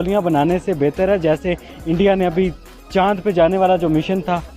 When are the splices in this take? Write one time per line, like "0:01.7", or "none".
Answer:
none